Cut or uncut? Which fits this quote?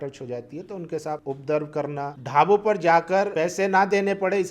cut